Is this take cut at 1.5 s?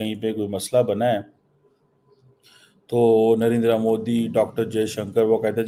no; 0 cuts

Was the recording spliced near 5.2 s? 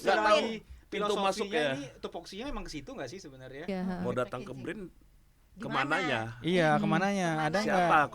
no; 1 cut; at 3.7 s

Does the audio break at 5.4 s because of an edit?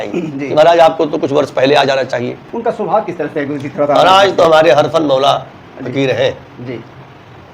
no; 1 cut; at 2.4 s

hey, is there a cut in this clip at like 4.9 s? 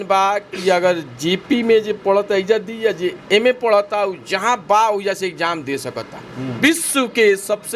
no; 1 cut; at 6.5 s

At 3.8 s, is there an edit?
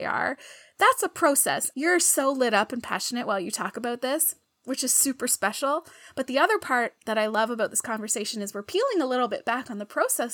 no; 1 cut; at 1.6 s

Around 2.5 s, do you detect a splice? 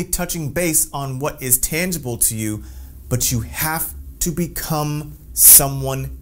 no; 0 cuts

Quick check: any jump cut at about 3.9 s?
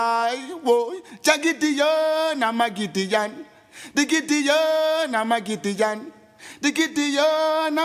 no; 0 cuts

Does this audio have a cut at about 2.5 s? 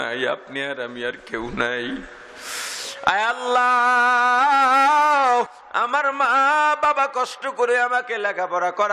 no; 1 cut; at 5.6 s

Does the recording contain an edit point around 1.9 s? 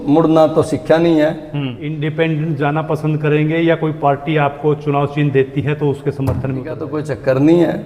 yes; 2 cuts; at 1.9 s, 6.9 s

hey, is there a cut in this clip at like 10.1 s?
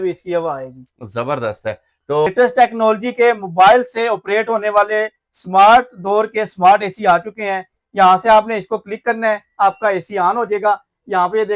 no; 1 cut; at 2.3 s

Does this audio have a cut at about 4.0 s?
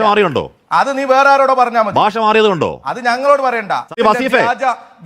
yes; 1 cut; at 4.0 s

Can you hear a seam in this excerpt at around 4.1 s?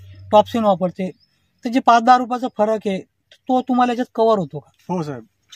no; 0 cuts

